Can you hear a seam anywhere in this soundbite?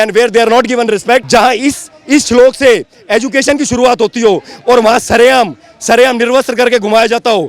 yes; 1 cut; at 1.2 s

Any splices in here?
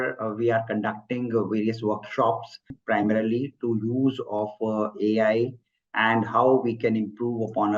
yes; 1 cut; at 2.7 s

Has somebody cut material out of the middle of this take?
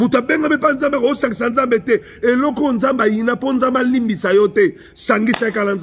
no; 0 cuts

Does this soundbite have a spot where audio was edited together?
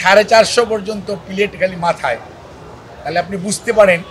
no; 0 cuts

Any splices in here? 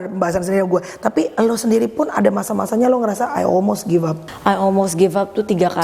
yes; 1 cut; at 4.2 s

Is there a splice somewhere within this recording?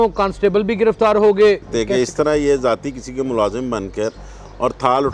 yes; 1 cut; at 1.7 s

